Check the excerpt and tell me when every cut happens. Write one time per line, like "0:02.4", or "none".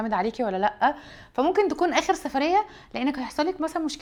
none